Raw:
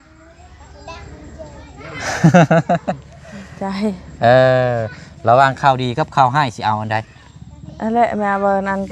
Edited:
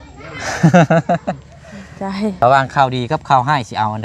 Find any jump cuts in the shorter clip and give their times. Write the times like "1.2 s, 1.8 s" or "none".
2.4 s